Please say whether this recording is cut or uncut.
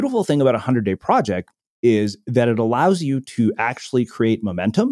uncut